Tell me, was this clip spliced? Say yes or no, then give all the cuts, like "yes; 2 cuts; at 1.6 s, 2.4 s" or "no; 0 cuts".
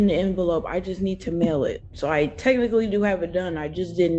yes; 1 cut; at 1.9 s